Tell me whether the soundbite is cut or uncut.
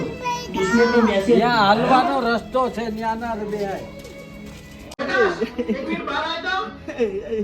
cut